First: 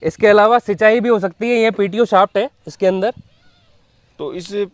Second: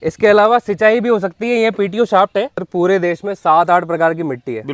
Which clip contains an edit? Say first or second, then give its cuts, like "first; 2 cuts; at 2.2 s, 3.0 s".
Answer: second; 1 cut; at 2.7 s